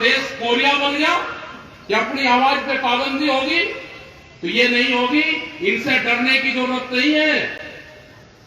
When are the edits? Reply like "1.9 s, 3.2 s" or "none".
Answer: none